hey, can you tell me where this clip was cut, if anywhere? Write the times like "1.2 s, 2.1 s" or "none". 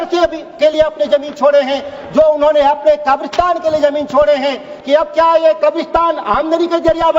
4.7 s